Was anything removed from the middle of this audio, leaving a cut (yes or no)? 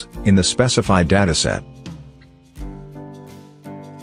no